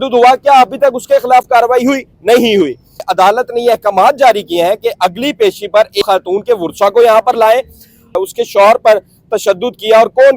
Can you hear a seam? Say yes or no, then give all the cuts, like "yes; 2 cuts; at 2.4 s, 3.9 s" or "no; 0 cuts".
yes; 3 cuts; at 3.1 s, 6.0 s, 8.1 s